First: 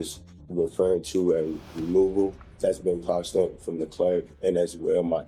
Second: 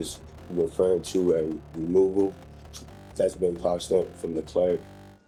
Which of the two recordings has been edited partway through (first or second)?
first